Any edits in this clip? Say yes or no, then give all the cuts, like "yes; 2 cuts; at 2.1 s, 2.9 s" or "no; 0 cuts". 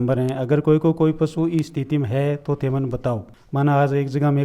yes; 1 cut; at 3.4 s